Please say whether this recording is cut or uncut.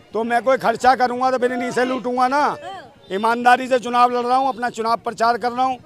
uncut